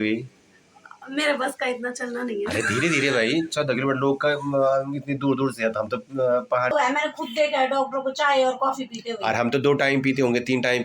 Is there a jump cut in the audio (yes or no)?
yes